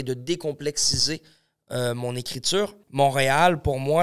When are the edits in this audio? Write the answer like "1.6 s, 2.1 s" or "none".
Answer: 2.8 s